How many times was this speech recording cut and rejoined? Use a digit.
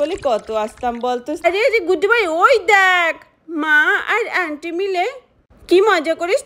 1